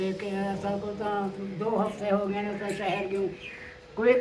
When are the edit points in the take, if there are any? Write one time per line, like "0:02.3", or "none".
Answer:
none